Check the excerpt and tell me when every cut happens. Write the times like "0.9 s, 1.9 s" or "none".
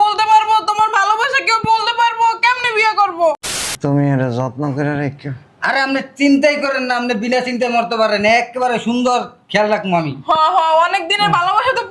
3.4 s